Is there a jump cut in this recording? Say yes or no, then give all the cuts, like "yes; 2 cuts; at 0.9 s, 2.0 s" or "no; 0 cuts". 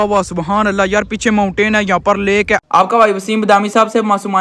yes; 1 cut; at 2.6 s